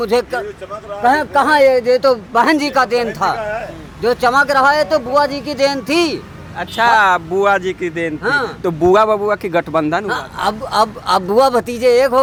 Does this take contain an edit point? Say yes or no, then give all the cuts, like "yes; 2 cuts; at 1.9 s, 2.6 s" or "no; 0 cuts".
no; 0 cuts